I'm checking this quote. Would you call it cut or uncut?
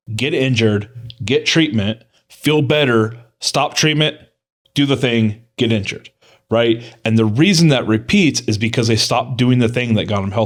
uncut